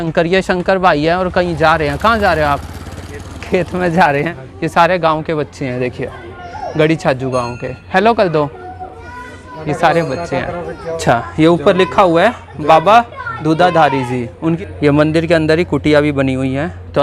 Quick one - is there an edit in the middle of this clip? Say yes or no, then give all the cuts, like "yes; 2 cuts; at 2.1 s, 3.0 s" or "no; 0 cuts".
yes; 3 cuts; at 4.4 s, 11.0 s, 14.6 s